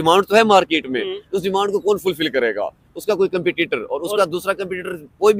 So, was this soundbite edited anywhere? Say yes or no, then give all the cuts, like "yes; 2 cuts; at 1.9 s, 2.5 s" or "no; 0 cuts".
no; 0 cuts